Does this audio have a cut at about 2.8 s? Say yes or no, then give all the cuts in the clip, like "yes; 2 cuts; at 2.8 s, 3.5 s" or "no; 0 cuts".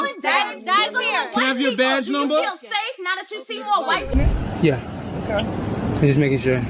no; 1 cut; at 4.1 s